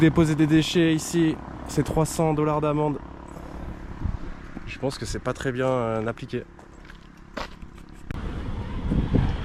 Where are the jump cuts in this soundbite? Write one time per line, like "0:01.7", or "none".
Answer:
none